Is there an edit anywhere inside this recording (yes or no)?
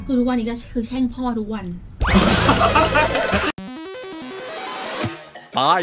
yes